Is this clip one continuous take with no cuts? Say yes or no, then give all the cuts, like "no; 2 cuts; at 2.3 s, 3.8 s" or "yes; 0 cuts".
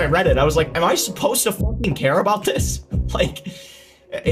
yes; 0 cuts